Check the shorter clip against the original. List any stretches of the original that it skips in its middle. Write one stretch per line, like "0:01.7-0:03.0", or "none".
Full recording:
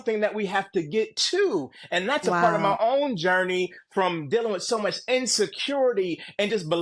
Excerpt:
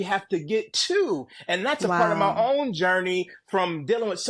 none

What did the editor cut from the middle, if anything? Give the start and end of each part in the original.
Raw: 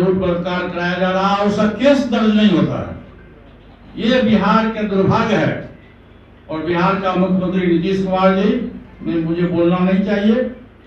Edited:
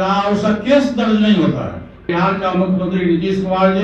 0:03.2-0:06.7

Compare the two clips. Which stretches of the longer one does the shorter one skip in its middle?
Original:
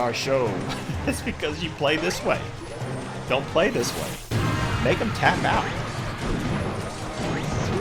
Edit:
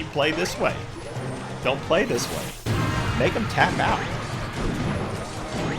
none

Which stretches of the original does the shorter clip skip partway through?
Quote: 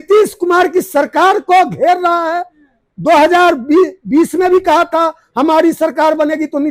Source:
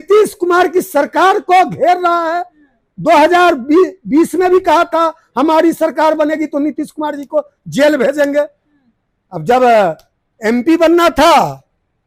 none

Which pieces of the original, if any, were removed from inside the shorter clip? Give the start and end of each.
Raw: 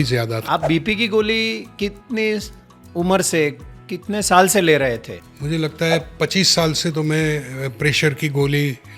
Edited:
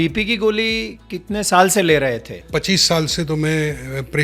0:01.6-0:03.7
0:05.2-0:06.1

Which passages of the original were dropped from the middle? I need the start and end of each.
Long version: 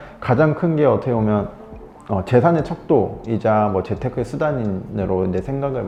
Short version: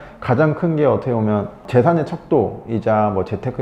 0:01.6-0:02.2

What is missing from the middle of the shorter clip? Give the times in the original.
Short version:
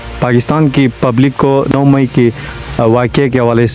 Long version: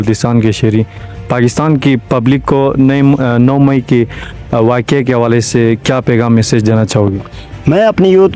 0:02.8-0:03.5

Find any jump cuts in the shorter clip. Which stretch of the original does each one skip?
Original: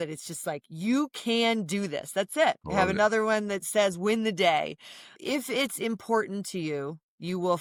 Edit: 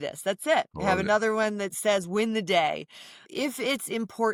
none

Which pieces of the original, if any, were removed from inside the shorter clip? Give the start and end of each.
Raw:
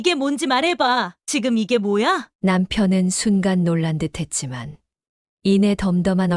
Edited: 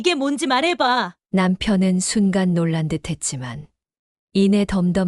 0:01.2-0:02.3

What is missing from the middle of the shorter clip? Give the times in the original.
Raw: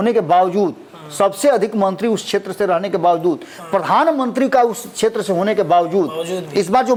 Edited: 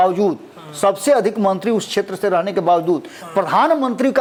none

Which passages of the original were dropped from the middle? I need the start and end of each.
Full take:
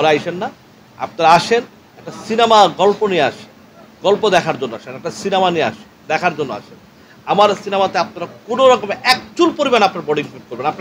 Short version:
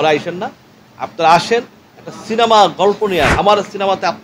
0:03.3-0:07.2

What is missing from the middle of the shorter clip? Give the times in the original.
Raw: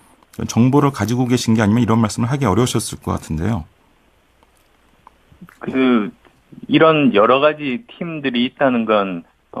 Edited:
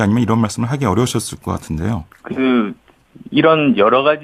0:03.7-0:05.5

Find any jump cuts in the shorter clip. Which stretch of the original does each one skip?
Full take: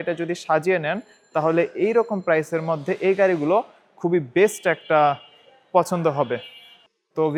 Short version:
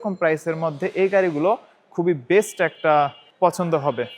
0:05.3-0:05.6

